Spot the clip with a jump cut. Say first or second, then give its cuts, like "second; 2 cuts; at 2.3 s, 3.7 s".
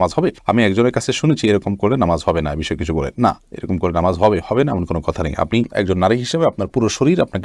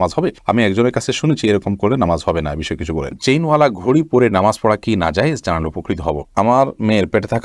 second; 2 cuts; at 3.1 s, 6.3 s